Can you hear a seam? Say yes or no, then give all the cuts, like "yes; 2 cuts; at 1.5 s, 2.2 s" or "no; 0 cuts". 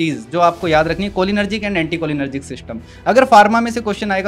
no; 0 cuts